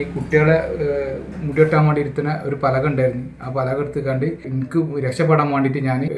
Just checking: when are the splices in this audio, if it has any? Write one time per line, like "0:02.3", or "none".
none